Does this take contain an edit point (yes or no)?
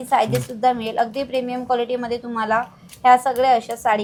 no